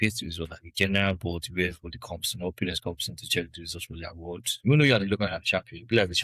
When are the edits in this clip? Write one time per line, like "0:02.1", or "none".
0:04.5